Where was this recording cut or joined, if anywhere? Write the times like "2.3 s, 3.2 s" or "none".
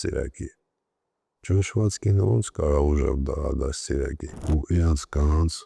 4.3 s

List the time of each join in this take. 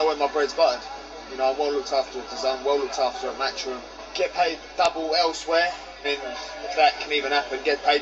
3.9 s, 5.9 s

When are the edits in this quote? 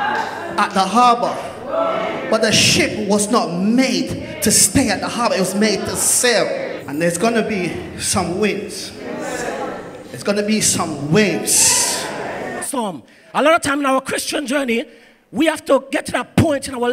6.8 s, 12.6 s

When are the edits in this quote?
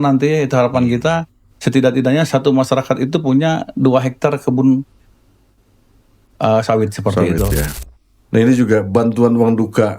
7.8 s

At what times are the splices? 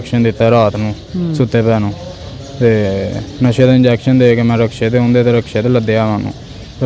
none

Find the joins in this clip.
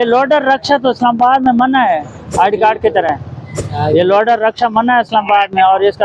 2.2 s, 3.6 s

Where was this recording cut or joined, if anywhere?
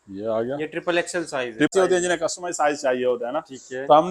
1.7 s

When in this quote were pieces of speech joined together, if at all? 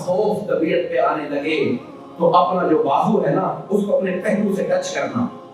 none

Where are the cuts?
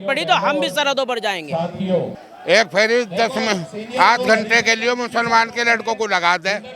2.3 s

